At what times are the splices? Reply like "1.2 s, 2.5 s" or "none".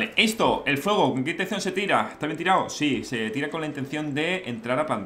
none